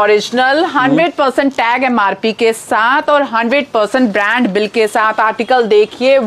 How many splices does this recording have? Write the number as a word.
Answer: zero